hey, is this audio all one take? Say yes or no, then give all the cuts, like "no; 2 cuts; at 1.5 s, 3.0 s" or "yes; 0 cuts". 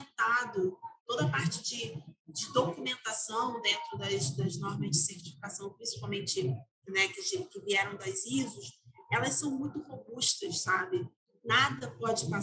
yes; 0 cuts